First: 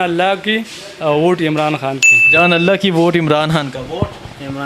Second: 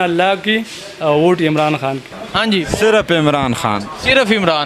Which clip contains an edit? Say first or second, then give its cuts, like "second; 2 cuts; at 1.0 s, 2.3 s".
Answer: second; 1 cut; at 2.1 s